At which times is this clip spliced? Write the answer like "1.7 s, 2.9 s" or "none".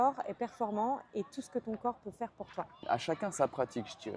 2.8 s